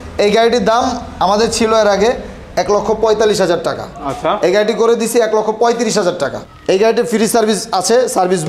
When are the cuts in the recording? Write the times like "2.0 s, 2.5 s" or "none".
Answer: 6.4 s